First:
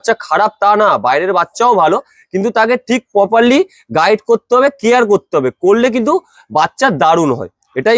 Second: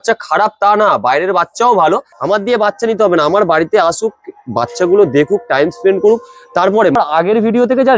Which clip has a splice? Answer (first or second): second